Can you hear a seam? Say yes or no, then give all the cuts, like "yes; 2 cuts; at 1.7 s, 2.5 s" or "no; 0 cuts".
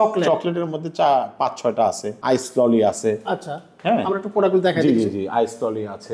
yes; 1 cut; at 2.1 s